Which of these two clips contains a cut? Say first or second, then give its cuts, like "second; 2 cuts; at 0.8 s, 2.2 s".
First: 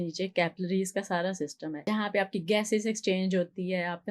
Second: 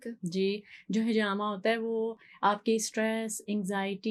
first; 1 cut; at 1.7 s